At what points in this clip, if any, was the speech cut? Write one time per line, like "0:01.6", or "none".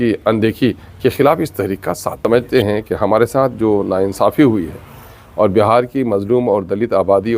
0:02.2